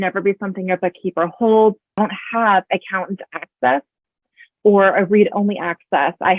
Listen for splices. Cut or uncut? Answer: cut